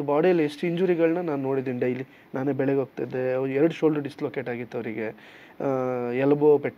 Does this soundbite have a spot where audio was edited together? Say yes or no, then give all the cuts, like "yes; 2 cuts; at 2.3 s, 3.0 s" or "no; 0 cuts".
no; 0 cuts